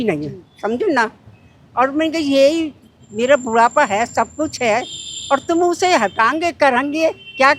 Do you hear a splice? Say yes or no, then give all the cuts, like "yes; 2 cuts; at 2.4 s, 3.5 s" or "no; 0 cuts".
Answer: no; 0 cuts